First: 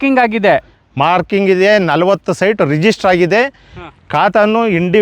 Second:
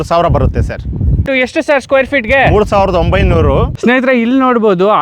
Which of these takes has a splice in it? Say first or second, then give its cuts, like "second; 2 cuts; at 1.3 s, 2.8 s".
second; 2 cuts; at 1.2 s, 3.7 s